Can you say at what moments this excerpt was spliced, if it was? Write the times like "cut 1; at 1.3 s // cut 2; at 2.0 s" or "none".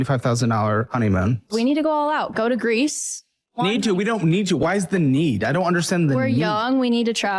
none